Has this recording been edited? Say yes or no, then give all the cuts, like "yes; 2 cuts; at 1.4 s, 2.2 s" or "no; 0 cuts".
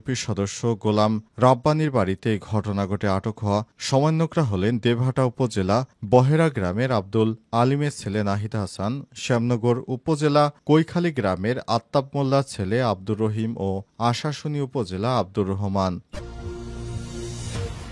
yes; 1 cut; at 16.1 s